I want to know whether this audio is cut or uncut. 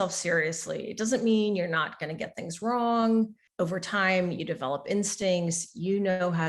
cut